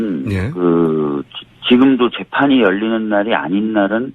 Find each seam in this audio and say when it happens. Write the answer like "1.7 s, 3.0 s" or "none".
1.3 s